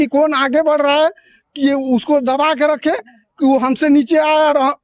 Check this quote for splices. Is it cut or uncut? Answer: uncut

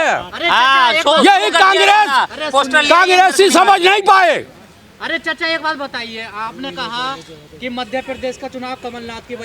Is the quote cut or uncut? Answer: uncut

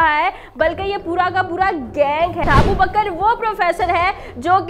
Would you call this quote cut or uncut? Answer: cut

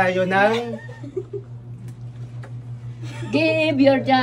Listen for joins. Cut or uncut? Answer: uncut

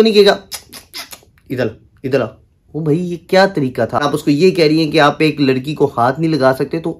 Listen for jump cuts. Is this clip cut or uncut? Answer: cut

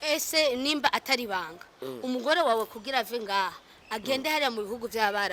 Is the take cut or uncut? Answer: uncut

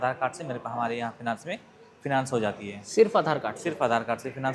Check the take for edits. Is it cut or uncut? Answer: uncut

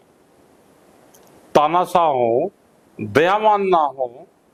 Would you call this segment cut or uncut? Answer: uncut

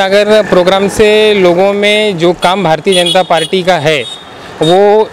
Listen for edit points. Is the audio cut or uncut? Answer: uncut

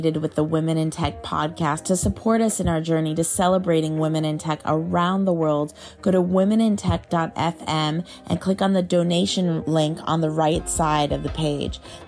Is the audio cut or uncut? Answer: uncut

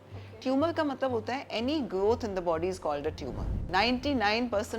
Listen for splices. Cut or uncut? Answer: cut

